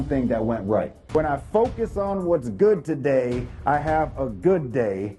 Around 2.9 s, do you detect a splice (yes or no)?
no